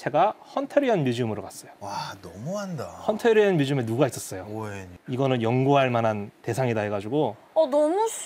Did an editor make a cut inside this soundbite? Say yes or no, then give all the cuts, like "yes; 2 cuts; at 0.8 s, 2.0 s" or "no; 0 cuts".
no; 0 cuts